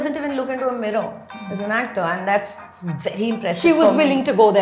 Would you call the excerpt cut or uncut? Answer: uncut